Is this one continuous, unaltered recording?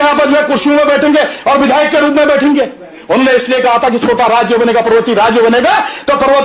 yes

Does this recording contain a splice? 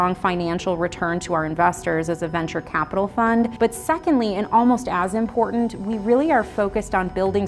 no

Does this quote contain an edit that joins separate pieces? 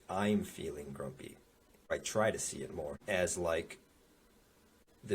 yes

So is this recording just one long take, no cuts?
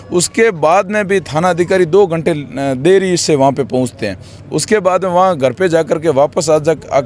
yes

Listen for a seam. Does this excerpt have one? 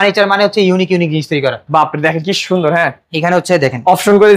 no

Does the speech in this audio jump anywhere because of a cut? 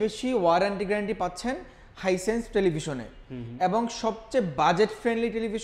no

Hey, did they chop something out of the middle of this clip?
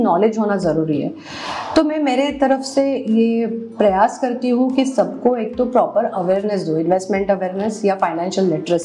no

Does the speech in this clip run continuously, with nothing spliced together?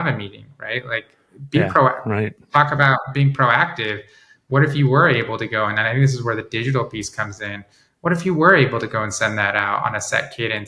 yes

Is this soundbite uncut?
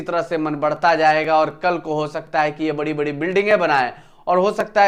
yes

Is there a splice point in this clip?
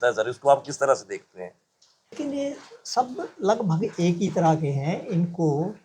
yes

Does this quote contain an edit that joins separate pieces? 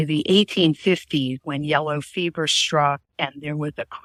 no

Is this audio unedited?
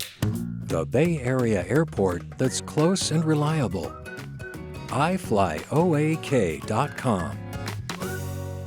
yes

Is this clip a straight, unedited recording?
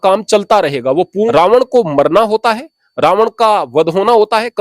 no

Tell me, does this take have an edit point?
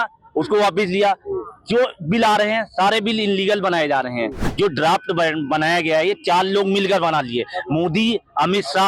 yes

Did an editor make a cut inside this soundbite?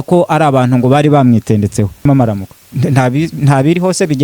yes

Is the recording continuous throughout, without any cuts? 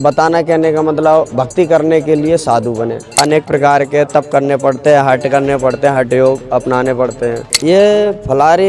no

